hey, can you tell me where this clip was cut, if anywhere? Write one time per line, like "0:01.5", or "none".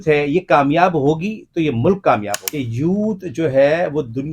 0:02.4